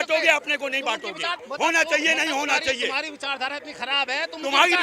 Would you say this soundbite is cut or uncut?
cut